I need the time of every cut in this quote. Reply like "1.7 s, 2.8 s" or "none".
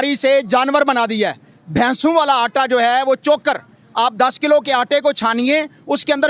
none